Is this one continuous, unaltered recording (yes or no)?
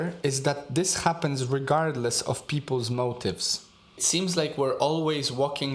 no